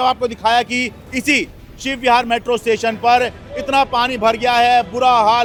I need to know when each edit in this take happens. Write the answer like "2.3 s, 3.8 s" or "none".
none